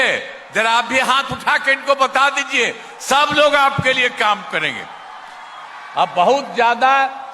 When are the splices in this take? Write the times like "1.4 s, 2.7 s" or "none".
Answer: none